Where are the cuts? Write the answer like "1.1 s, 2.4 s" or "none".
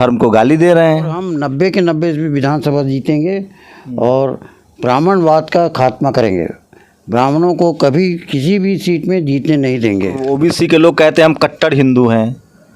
1.3 s, 10.3 s